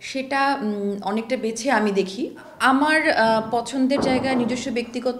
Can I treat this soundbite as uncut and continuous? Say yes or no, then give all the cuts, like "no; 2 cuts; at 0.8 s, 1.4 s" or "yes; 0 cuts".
no; 1 cut; at 2.4 s